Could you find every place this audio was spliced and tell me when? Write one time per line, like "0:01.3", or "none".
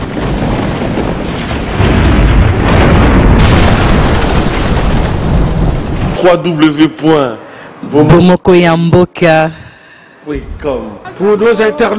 0:06.1